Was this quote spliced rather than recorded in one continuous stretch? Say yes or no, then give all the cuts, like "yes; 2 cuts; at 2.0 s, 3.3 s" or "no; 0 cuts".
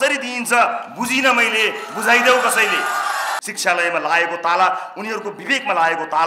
yes; 1 cut; at 3.4 s